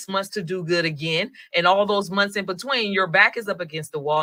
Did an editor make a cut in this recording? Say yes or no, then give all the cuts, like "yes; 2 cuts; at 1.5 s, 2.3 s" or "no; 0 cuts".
no; 0 cuts